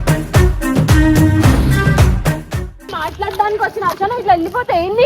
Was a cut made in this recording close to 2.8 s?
yes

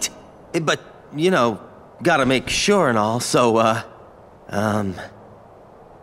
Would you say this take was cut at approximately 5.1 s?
yes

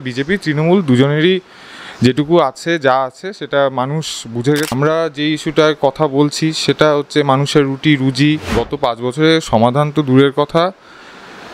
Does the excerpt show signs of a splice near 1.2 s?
no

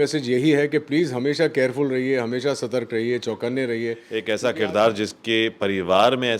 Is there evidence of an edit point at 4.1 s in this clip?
yes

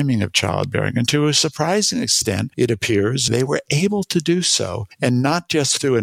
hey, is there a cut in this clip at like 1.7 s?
no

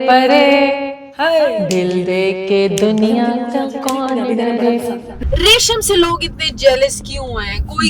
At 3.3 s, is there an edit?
no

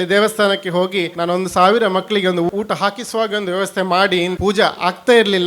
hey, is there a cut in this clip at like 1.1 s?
yes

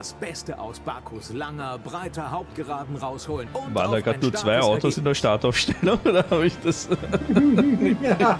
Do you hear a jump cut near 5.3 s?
no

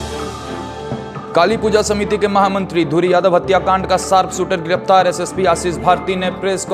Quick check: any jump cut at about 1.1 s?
yes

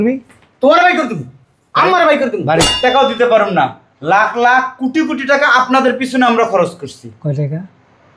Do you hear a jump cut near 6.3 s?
no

